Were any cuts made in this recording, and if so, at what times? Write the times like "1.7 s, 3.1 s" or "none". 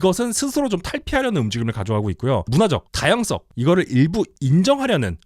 2.5 s